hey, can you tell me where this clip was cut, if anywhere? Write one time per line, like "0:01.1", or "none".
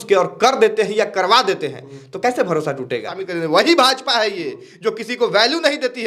0:03.2